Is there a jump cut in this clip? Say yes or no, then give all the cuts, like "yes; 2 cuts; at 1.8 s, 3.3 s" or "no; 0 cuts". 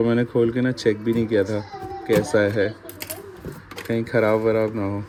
no; 0 cuts